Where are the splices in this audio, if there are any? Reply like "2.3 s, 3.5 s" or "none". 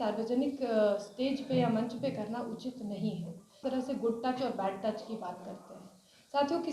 3.6 s